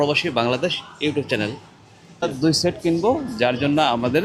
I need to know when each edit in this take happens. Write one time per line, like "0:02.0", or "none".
0:02.2

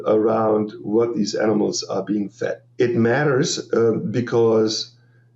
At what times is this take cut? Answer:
0:02.6

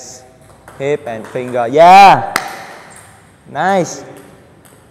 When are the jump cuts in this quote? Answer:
0:01.9

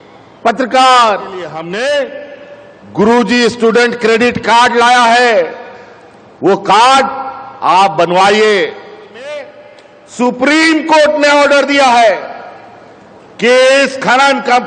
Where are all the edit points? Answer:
0:01.6
0:09.3

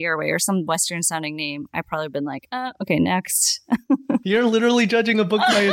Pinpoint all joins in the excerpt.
none

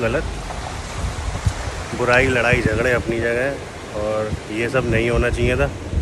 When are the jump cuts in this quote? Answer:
none

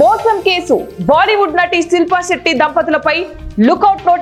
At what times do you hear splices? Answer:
none

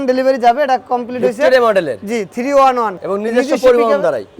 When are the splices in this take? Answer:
0:03.0

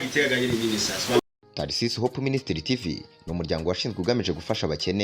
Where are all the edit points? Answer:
0:01.2

